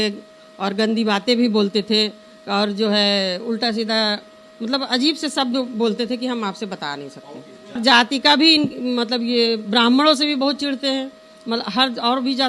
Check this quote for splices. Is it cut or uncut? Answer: cut